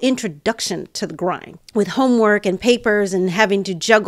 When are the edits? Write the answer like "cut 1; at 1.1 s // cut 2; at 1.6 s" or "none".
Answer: cut 1; at 1.5 s